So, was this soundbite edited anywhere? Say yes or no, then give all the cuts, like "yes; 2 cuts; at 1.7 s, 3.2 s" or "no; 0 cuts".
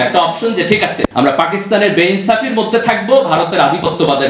yes; 1 cut; at 1.1 s